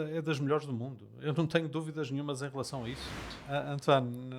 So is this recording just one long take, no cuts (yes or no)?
no